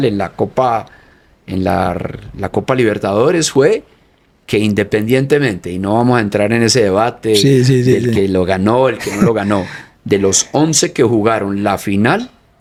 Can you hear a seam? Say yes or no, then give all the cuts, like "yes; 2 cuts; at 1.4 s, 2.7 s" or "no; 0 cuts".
no; 0 cuts